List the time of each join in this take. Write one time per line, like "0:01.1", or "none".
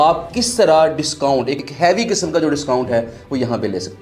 0:01.7